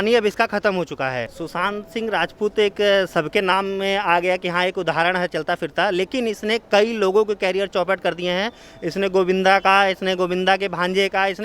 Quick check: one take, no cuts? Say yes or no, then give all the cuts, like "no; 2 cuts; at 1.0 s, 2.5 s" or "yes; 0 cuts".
no; 1 cut; at 1.4 s